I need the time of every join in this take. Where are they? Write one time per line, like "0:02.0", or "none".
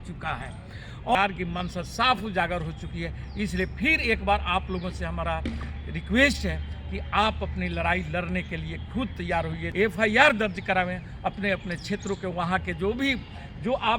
0:01.1
0:09.6